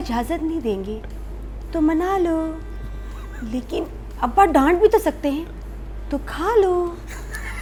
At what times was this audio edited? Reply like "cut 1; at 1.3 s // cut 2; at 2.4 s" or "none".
none